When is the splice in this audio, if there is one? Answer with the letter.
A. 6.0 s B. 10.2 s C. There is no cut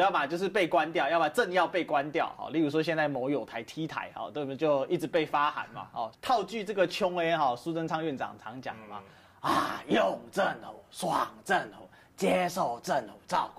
A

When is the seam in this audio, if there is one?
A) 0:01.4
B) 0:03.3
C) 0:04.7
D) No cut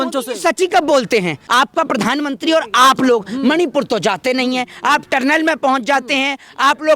A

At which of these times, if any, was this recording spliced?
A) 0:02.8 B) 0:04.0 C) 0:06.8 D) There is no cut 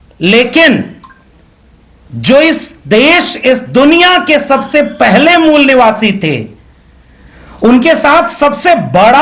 D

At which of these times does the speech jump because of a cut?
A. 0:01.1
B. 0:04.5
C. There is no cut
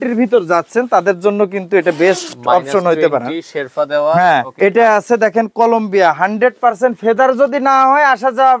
B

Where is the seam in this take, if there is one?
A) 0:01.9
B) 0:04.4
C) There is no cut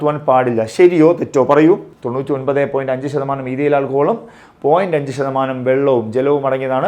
A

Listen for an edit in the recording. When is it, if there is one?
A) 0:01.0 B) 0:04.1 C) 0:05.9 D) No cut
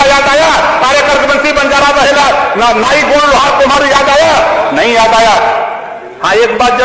C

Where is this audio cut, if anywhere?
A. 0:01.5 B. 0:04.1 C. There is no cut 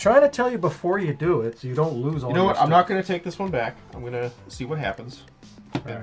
C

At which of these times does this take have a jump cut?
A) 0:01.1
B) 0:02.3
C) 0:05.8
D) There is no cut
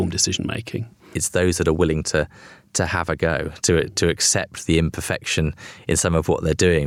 A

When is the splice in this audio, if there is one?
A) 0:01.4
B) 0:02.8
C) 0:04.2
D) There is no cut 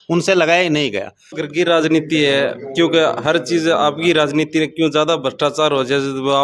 A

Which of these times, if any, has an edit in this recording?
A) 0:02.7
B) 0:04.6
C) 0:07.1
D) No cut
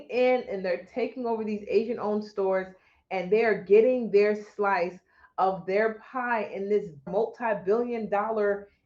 C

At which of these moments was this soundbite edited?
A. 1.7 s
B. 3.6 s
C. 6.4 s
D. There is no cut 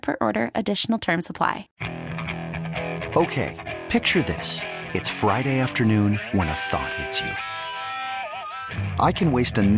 A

